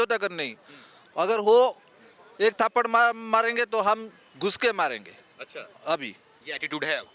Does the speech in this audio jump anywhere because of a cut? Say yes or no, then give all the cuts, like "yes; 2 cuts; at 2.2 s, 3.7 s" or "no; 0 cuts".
no; 0 cuts